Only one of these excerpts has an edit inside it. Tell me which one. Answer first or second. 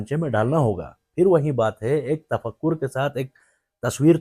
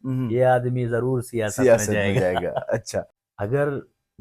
second